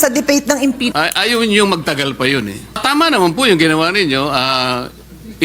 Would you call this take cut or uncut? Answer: cut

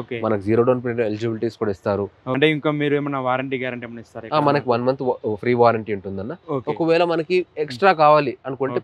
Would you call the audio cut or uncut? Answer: cut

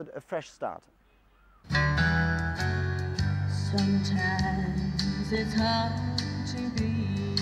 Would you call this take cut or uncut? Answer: uncut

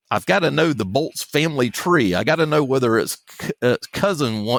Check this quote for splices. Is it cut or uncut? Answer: uncut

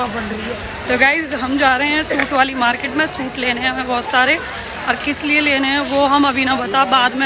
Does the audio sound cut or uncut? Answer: uncut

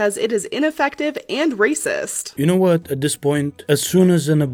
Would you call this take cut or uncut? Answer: uncut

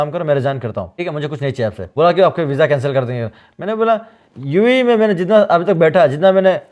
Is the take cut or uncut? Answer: cut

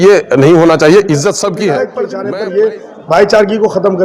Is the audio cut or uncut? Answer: cut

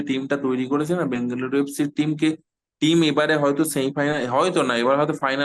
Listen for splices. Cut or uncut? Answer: uncut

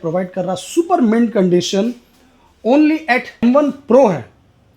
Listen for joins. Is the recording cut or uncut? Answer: cut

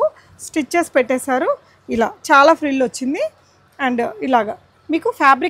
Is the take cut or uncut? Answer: uncut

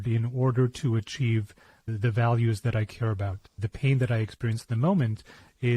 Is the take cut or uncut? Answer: cut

